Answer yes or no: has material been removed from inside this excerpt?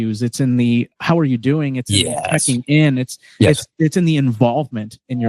no